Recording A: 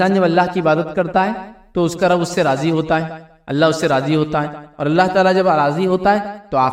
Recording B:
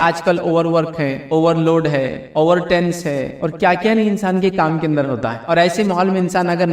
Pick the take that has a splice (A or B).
B